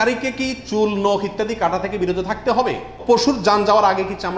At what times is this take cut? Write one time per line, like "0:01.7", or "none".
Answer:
0:02.9